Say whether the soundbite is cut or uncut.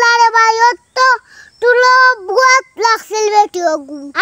uncut